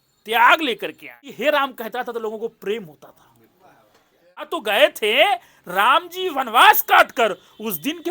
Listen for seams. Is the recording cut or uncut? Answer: cut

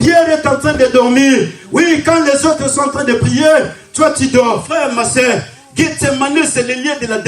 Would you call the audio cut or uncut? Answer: cut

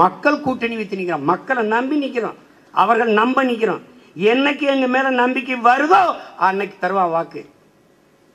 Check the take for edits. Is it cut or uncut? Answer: uncut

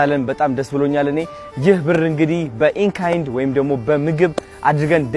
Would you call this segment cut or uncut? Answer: uncut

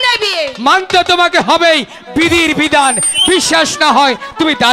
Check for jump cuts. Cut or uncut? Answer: uncut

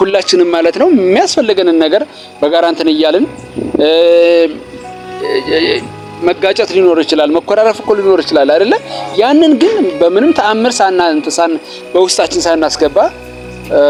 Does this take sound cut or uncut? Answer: uncut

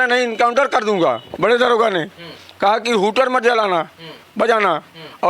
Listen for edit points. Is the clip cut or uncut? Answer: cut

